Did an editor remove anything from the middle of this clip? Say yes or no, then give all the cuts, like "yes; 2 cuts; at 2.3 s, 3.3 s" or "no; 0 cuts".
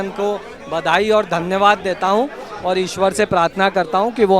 no; 0 cuts